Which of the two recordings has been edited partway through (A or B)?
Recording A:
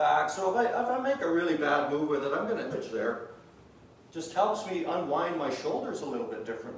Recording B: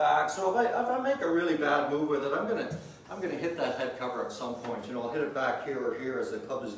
A